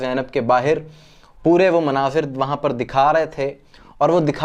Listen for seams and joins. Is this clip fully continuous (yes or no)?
yes